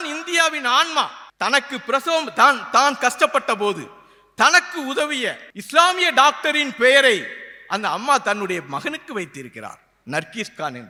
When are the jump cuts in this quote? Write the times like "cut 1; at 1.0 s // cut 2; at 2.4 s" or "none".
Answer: none